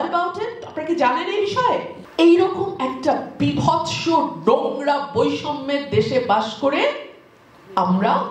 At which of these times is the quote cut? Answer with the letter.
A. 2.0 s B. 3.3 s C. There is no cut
A